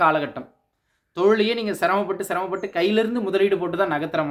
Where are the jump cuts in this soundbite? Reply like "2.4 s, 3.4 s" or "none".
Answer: none